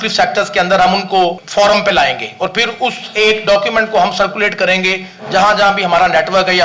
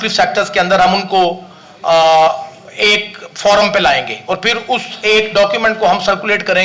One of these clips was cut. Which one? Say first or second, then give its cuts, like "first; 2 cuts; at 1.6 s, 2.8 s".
first; 1 cut; at 1.4 s